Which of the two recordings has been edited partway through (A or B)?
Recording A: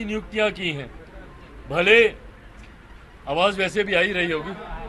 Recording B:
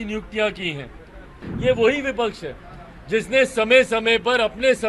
B